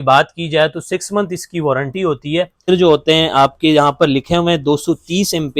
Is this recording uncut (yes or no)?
no